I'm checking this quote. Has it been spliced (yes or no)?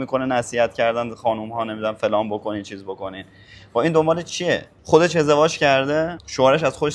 no